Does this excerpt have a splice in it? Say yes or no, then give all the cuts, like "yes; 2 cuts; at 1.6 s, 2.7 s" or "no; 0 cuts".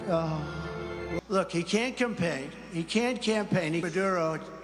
yes; 2 cuts; at 1.2 s, 3.8 s